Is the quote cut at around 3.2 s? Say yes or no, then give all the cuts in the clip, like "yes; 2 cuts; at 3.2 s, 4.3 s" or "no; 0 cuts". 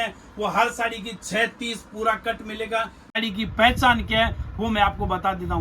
yes; 1 cut; at 3.2 s